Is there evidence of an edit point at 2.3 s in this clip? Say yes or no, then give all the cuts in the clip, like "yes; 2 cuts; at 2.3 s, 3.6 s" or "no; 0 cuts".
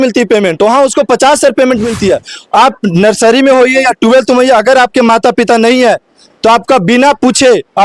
yes; 1 cut; at 2.3 s